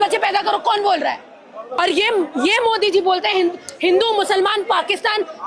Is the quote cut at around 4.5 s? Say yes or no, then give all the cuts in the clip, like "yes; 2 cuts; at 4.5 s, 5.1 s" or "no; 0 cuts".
no; 1 cut; at 1.8 s